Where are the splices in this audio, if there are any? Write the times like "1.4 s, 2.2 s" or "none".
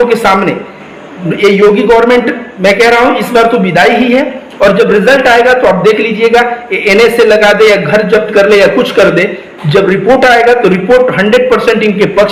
none